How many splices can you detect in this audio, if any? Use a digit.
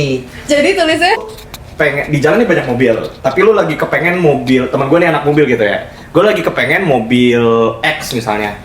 1